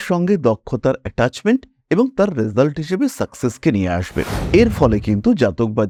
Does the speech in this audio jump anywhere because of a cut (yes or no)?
no